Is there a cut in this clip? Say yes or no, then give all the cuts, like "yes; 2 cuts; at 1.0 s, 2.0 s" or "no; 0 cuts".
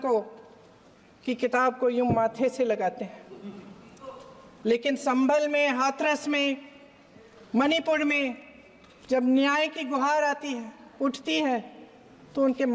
no; 0 cuts